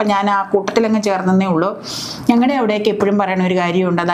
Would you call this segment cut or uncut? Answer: uncut